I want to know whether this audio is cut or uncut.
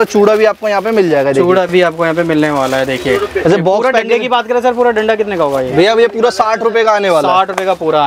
uncut